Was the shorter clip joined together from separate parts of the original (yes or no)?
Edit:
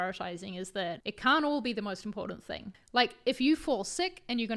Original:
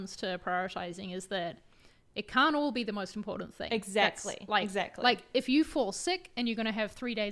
yes